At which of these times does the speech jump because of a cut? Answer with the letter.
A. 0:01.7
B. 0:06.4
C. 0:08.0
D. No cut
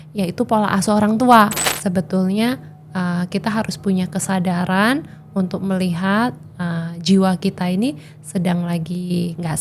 A